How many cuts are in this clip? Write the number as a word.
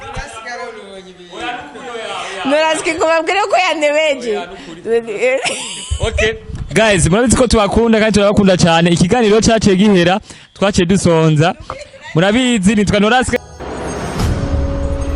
one